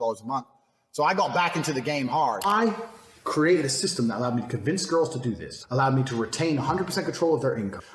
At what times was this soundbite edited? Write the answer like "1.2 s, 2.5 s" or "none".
2.4 s